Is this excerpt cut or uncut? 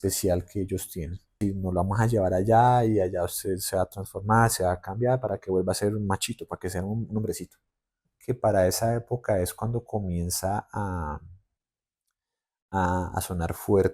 cut